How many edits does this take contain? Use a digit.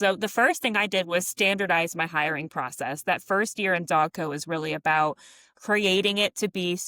0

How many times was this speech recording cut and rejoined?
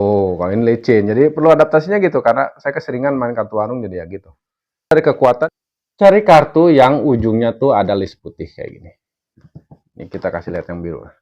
1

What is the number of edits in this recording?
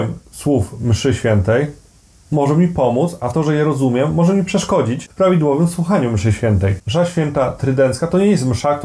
2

